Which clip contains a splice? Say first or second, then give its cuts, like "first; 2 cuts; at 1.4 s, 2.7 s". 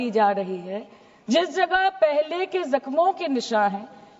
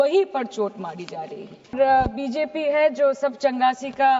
second; 1 cut; at 1.8 s